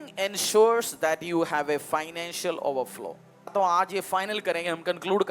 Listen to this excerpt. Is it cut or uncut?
cut